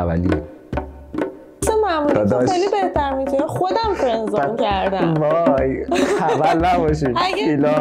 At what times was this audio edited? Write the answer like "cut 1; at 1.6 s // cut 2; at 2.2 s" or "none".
none